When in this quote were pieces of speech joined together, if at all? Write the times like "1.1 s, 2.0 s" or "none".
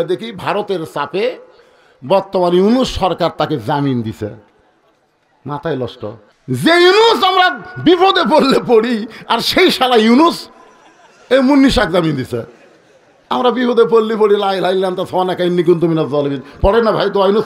6.3 s